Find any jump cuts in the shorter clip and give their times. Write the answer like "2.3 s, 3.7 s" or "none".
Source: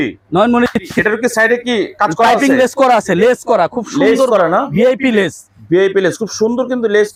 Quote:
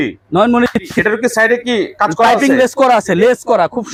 none